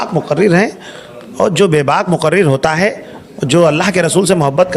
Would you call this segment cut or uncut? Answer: uncut